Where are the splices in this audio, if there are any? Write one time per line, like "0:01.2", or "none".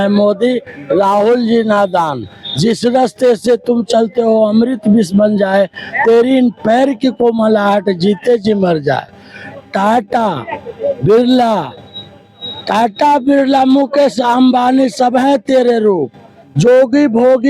none